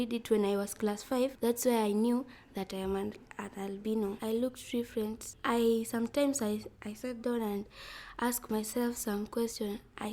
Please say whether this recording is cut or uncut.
uncut